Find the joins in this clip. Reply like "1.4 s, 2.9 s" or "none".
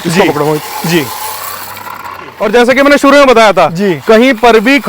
2.4 s